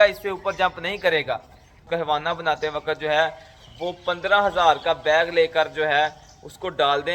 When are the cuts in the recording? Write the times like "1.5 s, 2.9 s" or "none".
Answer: 1.8 s